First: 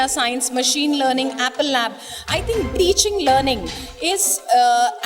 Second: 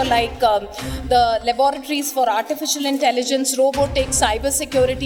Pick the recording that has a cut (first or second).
first